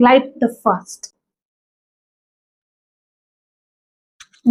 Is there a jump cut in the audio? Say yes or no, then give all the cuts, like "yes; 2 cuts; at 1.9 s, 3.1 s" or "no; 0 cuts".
no; 0 cuts